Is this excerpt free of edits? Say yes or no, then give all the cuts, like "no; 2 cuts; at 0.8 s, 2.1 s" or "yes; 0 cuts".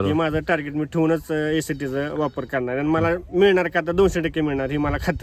yes; 0 cuts